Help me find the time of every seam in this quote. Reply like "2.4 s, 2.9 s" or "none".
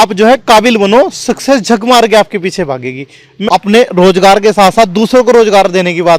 3.3 s